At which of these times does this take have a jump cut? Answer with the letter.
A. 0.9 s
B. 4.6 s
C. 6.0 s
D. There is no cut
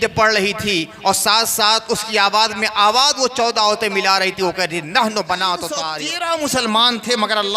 C